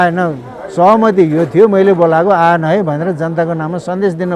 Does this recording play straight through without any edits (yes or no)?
yes